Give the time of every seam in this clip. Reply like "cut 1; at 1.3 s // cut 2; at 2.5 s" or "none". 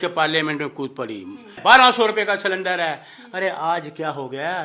cut 1; at 1.6 s